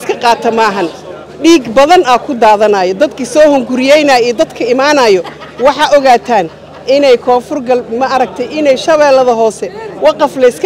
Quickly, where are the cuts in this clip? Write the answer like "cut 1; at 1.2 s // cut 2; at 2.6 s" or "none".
none